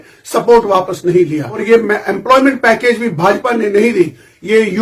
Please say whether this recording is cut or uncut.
cut